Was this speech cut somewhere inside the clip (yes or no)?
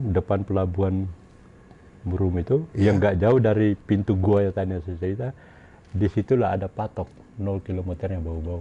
no